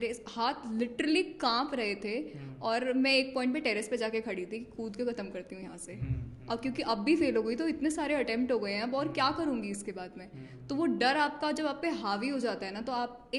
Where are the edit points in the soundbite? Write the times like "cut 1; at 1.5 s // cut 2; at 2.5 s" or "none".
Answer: none